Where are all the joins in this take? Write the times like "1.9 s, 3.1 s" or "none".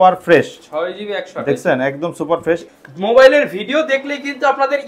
2.7 s